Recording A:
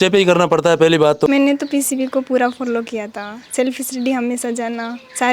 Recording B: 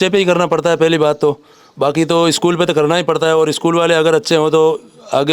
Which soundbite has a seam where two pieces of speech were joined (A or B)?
A